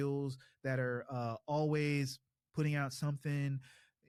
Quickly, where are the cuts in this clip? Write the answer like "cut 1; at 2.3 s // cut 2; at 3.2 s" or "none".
none